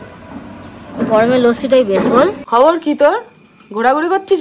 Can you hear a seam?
yes; 1 cut; at 2.4 s

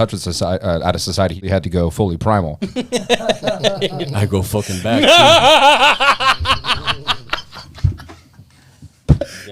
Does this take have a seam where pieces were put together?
yes; 1 cut; at 1.5 s

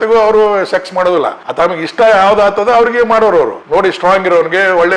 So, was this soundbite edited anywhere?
yes; 2 cuts; at 1.4 s, 3.6 s

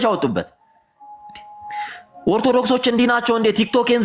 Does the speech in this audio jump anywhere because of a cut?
no; 0 cuts

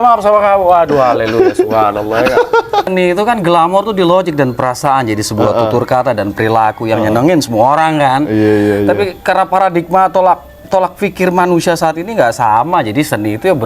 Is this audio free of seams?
no; 1 cut; at 2.9 s

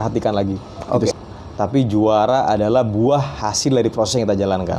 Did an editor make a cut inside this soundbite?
yes; 1 cut; at 1.1 s

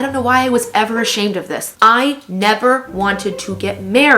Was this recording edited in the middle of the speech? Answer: yes; 1 cut; at 1.7 s

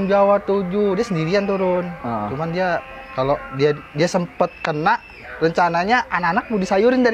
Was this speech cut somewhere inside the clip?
no; 0 cuts

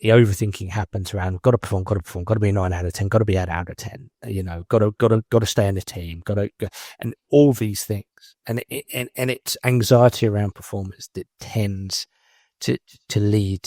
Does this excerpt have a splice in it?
no; 0 cuts

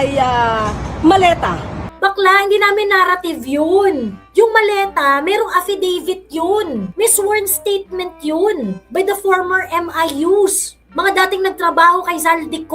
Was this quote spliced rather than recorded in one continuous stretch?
yes; 1 cut; at 1.9 s

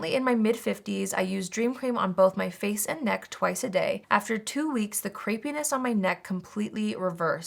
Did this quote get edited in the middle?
no; 0 cuts

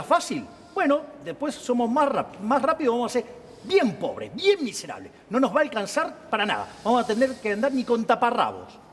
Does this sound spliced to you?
no; 0 cuts

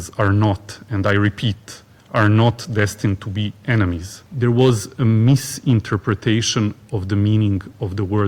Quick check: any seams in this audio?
yes; 1 cut; at 4.2 s

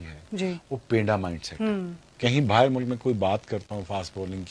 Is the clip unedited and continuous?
no; 1 cut; at 2.1 s

